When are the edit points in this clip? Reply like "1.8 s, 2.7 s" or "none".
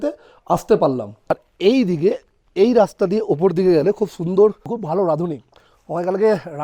1.5 s, 4.7 s